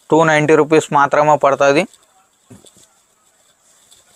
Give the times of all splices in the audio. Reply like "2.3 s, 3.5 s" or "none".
none